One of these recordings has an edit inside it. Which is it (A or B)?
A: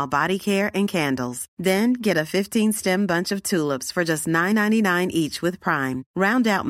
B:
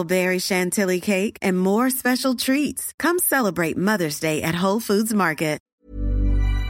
B